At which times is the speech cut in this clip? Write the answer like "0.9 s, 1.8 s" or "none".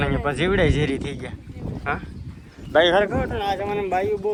none